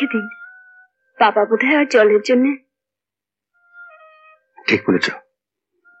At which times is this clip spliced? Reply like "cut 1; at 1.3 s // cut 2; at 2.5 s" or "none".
none